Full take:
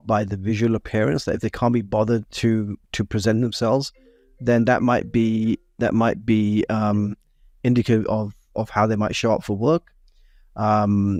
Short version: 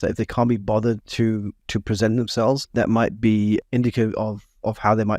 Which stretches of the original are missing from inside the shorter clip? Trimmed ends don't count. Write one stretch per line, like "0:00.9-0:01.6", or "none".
0:03.9-0:05.7
0:06.7-0:07.6